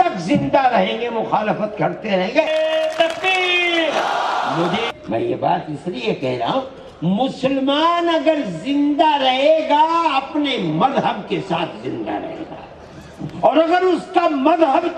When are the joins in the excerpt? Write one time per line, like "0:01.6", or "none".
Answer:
none